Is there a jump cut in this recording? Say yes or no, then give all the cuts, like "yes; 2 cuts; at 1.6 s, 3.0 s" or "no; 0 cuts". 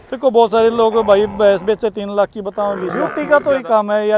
yes; 1 cut; at 3.0 s